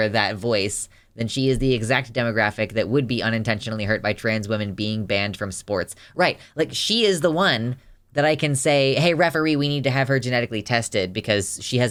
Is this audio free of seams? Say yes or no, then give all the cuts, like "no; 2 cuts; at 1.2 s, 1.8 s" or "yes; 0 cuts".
yes; 0 cuts